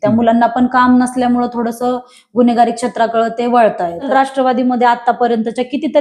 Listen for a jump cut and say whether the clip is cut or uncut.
cut